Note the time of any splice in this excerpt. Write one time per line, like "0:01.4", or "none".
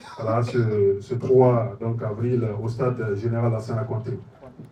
none